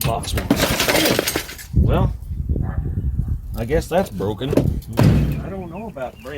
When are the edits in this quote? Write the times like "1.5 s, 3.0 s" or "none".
5.0 s